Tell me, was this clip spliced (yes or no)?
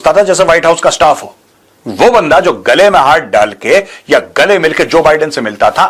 no